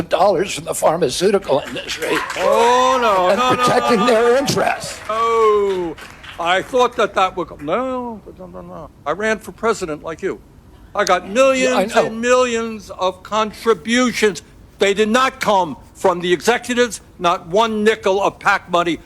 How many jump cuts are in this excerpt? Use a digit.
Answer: 1